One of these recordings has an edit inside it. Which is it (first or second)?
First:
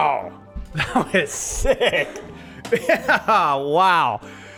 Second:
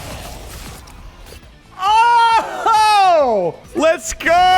second